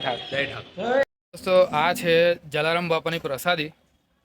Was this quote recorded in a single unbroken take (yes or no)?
no